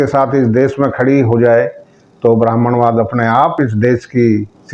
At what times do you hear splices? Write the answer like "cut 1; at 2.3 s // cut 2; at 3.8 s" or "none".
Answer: cut 1; at 3.5 s